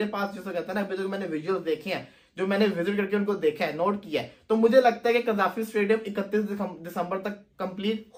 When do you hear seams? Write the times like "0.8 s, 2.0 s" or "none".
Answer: none